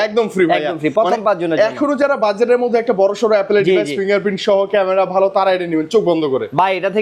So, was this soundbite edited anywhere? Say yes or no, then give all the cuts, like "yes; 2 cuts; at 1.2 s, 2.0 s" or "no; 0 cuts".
no; 0 cuts